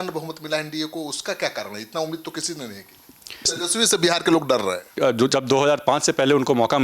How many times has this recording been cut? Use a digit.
2